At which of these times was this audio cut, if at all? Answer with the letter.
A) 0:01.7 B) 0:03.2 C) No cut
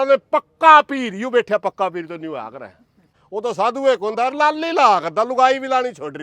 B